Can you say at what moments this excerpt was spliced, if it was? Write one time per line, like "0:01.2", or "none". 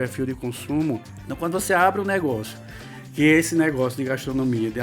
0:01.2